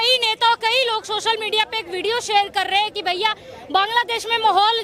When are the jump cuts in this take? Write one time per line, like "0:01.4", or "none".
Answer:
none